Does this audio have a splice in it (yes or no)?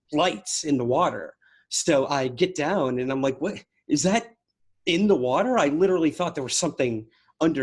no